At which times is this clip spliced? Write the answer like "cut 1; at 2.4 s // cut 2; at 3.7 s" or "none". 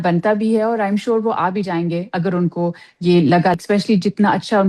cut 1; at 3.5 s